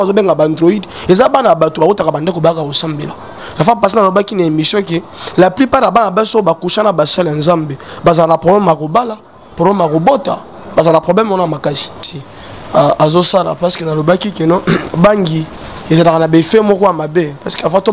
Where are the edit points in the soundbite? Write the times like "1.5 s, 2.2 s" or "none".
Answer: 12.1 s